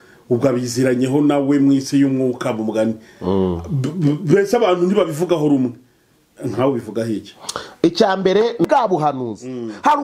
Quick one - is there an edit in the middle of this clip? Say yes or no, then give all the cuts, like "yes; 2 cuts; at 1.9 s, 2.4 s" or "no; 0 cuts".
yes; 1 cut; at 8.6 s